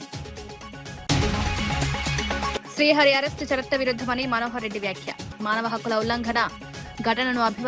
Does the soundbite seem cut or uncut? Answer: cut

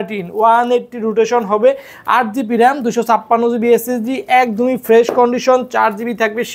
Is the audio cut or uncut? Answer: uncut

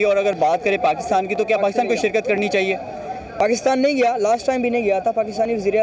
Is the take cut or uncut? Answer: uncut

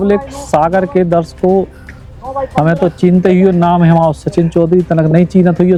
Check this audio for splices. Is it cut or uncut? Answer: uncut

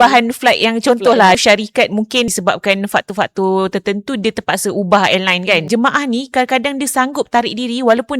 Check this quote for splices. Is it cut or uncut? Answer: cut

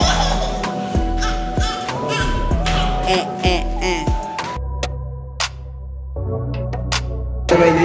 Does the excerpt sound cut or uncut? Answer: cut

